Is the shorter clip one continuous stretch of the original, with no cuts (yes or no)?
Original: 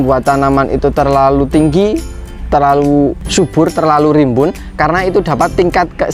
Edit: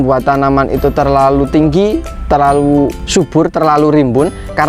no